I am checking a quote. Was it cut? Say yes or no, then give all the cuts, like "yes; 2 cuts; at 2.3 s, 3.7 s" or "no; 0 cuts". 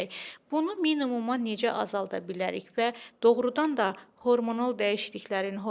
no; 0 cuts